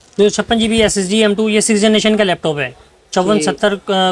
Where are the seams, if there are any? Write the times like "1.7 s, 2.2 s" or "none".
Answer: none